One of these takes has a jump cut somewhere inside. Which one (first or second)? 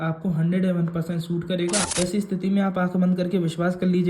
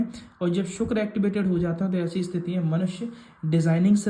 first